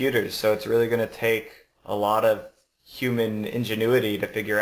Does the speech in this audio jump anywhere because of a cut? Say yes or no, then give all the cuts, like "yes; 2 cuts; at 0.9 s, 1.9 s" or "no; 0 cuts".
no; 0 cuts